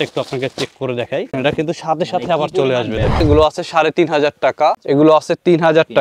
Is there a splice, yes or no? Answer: yes